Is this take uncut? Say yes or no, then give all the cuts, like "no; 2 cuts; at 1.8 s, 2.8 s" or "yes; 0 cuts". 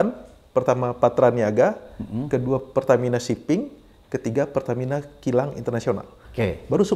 yes; 0 cuts